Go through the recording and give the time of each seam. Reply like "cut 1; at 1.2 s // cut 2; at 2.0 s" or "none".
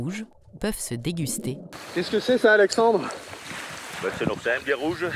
cut 1; at 1.7 s